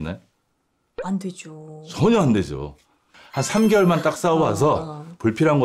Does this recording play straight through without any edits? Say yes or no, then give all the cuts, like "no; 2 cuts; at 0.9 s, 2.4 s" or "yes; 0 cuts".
no; 1 cut; at 3.0 s